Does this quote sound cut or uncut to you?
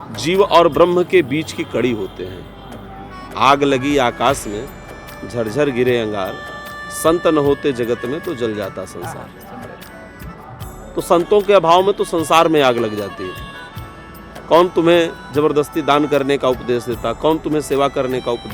uncut